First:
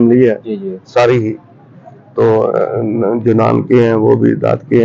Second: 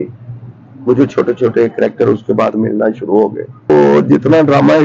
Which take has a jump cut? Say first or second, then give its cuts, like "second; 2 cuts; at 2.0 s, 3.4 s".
second; 1 cut; at 3.7 s